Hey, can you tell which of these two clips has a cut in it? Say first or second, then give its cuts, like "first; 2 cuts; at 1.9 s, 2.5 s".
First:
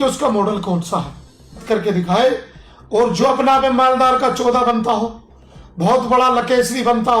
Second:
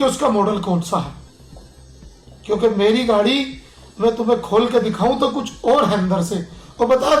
first; 1 cut; at 1.6 s